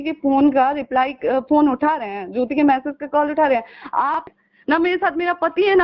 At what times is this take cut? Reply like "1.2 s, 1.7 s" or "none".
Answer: 4.3 s